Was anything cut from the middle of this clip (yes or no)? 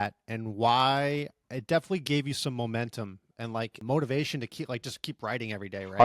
yes